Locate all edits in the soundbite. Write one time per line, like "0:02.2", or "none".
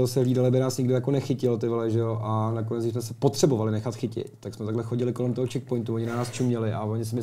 none

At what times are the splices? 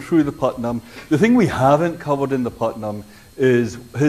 0:01.6

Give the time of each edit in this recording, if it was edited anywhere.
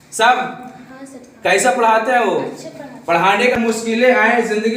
0:03.6

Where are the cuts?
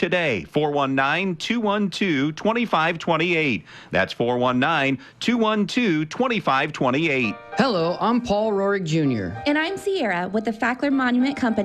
0:07.4

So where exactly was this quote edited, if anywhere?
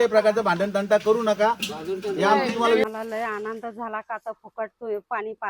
0:02.9

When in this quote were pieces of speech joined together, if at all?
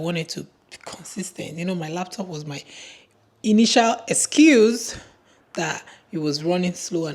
none

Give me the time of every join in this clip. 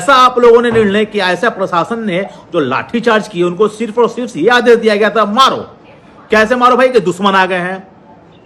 none

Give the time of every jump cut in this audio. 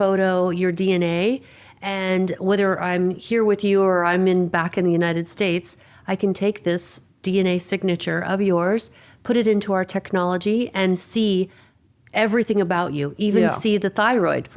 none

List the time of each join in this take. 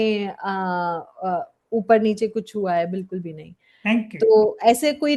none

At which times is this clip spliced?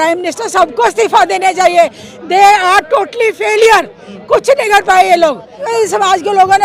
0:05.7

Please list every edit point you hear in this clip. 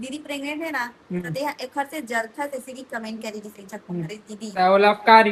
none

